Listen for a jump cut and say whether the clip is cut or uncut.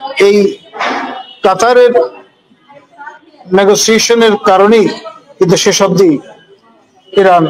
uncut